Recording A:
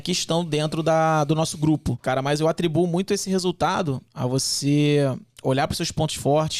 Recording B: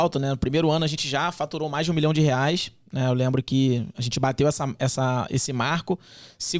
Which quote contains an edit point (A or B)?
A